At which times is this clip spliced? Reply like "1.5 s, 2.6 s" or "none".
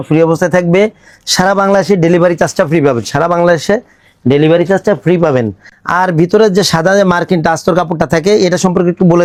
none